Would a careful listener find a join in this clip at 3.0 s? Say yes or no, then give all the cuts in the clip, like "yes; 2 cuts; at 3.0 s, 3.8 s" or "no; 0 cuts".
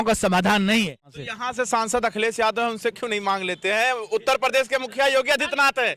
no; 1 cut; at 1.0 s